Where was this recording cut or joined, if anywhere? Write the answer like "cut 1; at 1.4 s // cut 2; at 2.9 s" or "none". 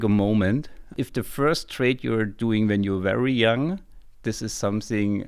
cut 1; at 1.0 s

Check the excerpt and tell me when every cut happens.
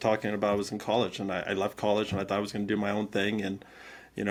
none

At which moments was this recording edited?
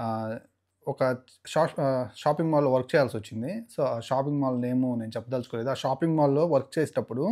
none

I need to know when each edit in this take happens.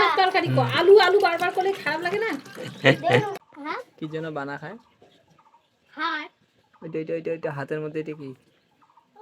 cut 1; at 3.4 s

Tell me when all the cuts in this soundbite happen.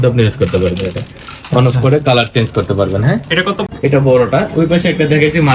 cut 1; at 3.6 s

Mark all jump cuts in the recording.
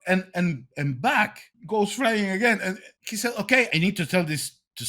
cut 1; at 1.5 s // cut 2; at 2.9 s // cut 3; at 3.7 s

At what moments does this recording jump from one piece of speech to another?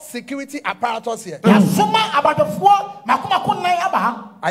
none

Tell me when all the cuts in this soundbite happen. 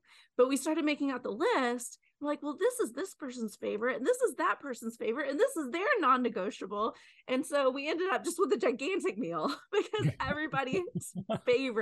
none

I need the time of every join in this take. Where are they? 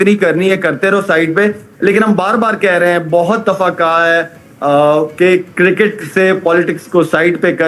none

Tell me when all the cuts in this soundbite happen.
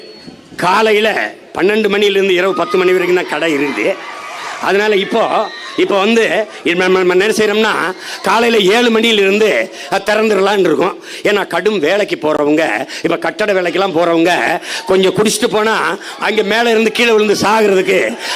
none

